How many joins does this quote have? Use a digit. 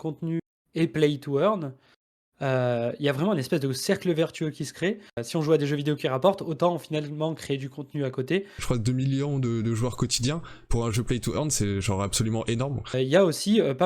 3